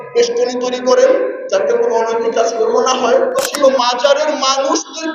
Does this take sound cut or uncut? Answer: cut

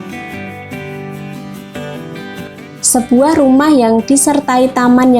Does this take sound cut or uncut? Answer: cut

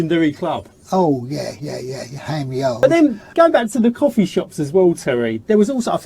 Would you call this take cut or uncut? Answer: cut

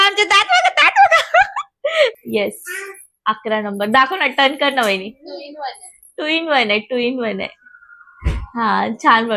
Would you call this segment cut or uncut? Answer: uncut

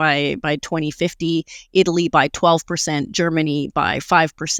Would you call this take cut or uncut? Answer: uncut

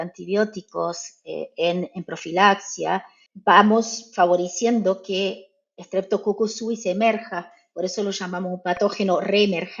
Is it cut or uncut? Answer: uncut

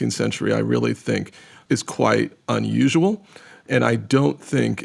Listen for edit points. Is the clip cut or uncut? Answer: cut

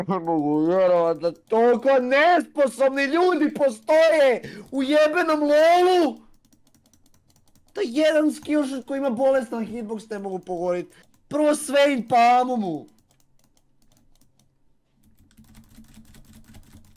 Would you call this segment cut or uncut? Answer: uncut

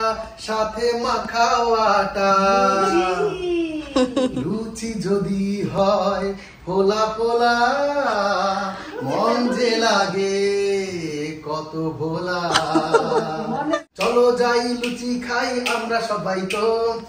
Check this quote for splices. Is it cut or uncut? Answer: cut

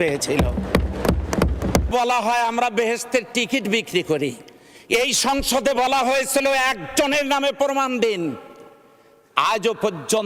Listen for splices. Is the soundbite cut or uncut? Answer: cut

